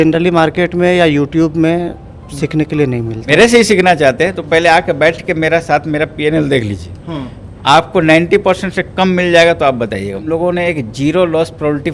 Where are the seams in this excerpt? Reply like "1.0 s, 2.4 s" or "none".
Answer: 3.3 s, 10.2 s